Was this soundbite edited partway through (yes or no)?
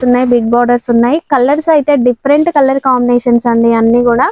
no